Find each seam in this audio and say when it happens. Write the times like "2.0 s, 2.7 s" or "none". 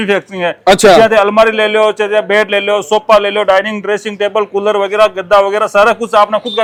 none